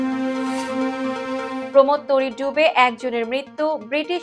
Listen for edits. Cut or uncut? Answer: cut